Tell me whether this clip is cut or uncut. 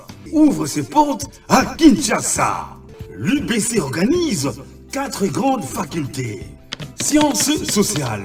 uncut